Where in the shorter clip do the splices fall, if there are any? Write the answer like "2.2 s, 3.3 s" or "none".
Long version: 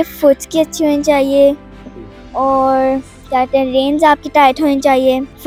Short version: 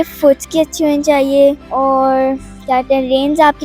1.6 s